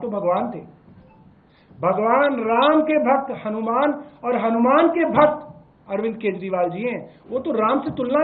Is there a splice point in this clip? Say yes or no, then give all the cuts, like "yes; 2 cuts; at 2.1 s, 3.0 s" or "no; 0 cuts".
no; 0 cuts